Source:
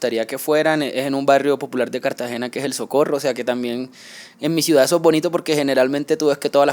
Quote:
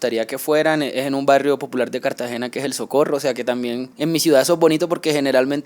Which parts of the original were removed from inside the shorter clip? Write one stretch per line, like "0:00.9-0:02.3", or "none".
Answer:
0:03.9-0:04.3